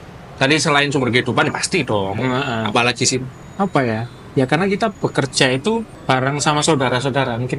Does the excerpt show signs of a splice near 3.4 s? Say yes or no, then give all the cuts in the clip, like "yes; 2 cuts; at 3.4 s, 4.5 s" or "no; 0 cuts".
yes; 2 cuts; at 3.4 s, 5.9 s